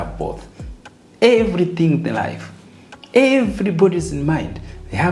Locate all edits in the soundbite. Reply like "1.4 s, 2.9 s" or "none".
none